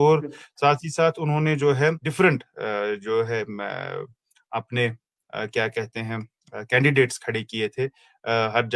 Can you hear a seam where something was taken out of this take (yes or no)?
yes